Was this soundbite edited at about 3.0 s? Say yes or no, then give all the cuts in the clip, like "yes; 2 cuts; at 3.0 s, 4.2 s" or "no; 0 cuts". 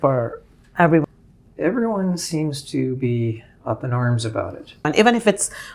no; 2 cuts; at 1.0 s, 4.8 s